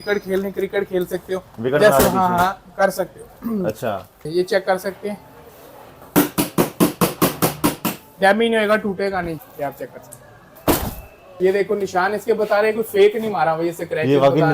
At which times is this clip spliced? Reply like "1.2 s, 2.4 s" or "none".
4.2 s, 9.4 s, 11.4 s